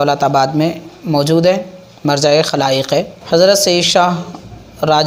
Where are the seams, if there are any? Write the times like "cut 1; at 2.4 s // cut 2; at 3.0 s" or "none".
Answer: cut 1; at 3.2 s